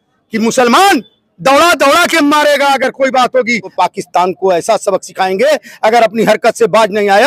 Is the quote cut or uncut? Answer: cut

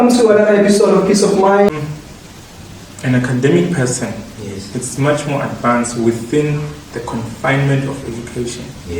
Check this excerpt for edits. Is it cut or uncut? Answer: cut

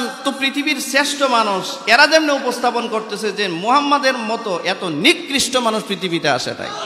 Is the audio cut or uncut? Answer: uncut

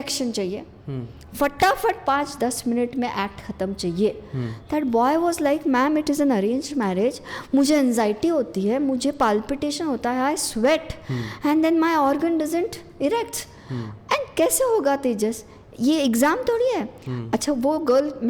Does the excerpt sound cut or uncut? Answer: uncut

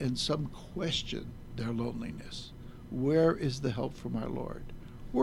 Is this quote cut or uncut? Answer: uncut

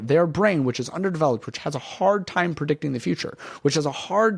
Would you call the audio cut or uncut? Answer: uncut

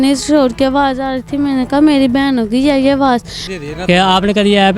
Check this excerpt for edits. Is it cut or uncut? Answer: cut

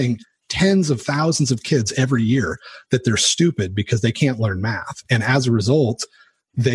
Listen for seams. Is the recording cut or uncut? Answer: uncut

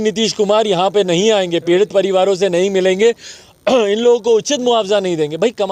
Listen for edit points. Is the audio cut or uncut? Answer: uncut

